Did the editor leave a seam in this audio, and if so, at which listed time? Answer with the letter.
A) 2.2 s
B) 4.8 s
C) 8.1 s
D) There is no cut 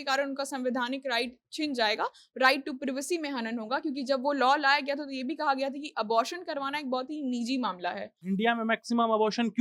C